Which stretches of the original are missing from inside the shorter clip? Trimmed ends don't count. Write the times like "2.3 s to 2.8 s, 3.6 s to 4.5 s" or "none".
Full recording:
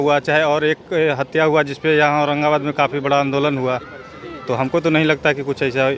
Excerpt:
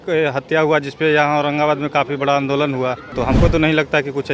3.9 s to 4.4 s